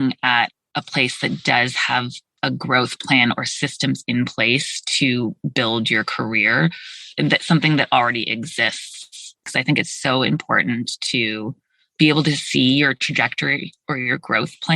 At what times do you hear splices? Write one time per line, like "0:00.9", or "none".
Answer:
0:09.5